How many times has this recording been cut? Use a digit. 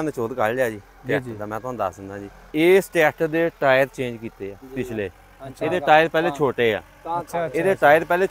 2